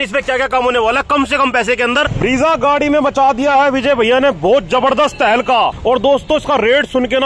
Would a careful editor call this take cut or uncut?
cut